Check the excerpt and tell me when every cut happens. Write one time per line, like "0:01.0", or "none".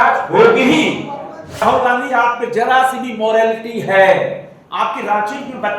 0:01.6
0:04.6